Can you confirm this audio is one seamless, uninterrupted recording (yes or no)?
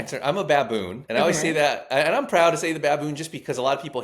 no